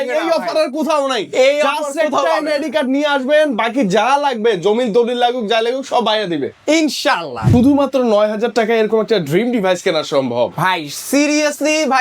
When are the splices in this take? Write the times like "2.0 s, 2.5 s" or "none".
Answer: 7.4 s